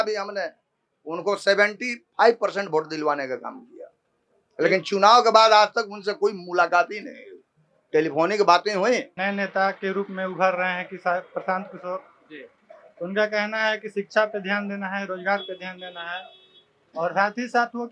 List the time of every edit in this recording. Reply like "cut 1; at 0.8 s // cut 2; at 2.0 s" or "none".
cut 1; at 9.1 s